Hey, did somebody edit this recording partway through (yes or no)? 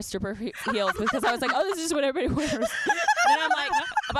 no